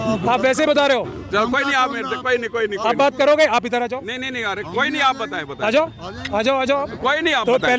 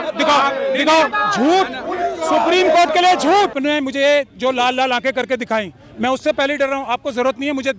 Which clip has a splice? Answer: second; 2 cuts; at 1.1 s, 3.6 s

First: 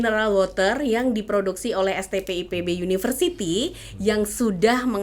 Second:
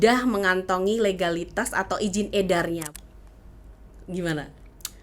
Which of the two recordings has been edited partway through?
second; 1 cut; at 2.9 s

